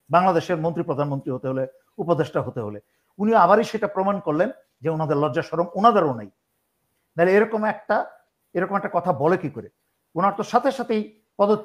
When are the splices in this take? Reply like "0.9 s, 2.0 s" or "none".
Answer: none